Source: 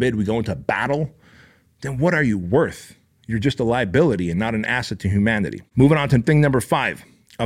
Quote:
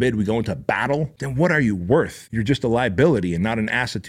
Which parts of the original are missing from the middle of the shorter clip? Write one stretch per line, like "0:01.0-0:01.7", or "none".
0:01.2-0:01.8
0:02.9-0:03.2